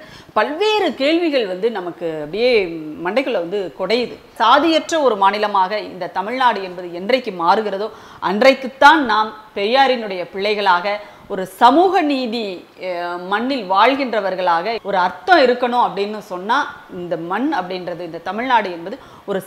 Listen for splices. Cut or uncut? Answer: cut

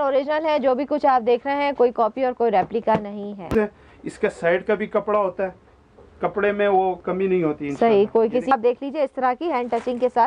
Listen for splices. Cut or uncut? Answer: cut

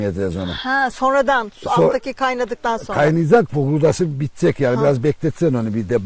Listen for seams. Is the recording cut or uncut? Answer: uncut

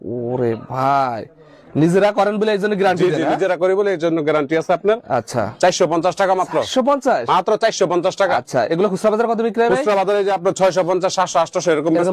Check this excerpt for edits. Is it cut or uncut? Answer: uncut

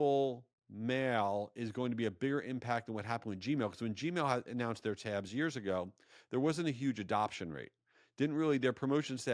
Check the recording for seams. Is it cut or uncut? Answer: uncut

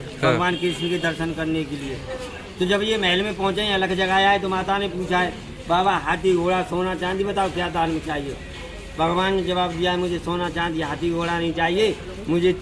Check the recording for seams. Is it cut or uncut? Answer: uncut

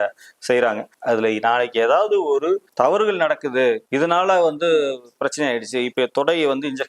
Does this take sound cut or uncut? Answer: cut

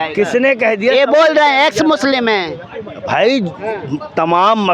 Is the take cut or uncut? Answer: uncut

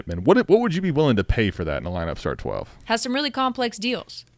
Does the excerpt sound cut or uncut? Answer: uncut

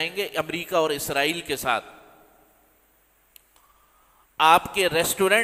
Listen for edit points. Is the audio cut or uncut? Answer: uncut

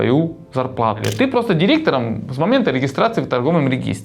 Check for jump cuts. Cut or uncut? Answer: cut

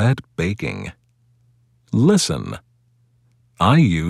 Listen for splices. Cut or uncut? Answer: cut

